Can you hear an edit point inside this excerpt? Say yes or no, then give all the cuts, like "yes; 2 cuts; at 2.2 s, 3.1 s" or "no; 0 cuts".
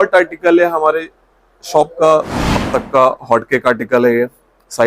yes; 1 cut; at 2.3 s